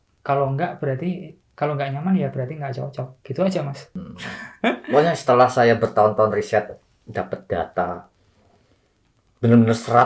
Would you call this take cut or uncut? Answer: cut